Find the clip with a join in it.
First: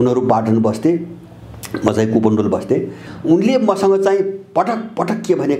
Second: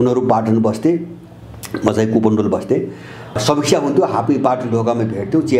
first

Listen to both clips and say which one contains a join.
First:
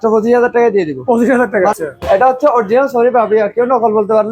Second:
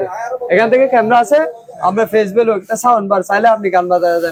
first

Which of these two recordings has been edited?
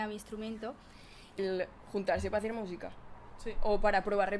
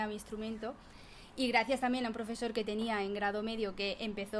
first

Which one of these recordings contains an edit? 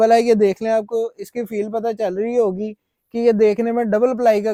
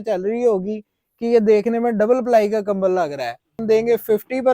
second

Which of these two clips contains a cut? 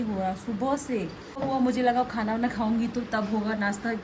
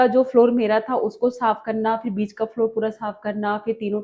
first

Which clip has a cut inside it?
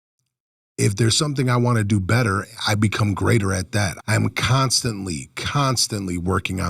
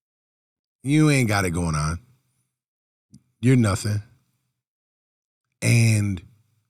first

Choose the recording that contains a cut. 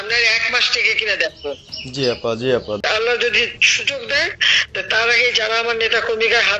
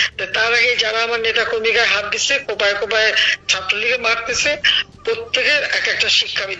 first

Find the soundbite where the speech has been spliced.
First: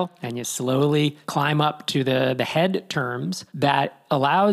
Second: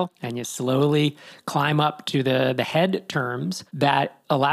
first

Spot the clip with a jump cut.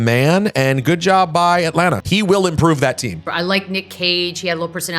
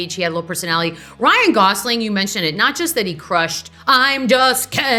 first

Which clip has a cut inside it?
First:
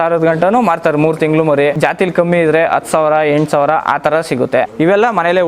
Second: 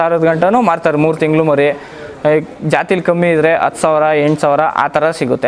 first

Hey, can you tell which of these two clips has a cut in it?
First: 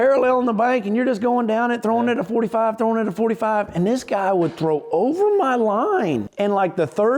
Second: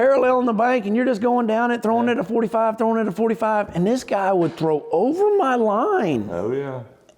first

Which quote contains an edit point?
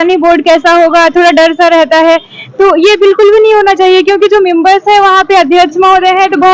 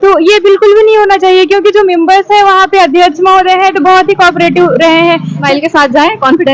second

